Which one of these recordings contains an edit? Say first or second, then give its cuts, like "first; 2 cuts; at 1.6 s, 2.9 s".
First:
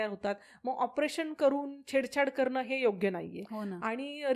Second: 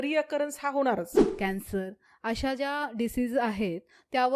second; 1 cut; at 1.2 s